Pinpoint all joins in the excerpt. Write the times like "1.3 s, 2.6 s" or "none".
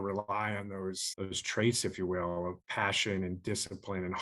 1.1 s, 2.6 s